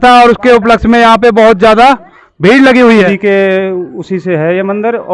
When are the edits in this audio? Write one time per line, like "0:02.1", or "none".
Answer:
0:03.1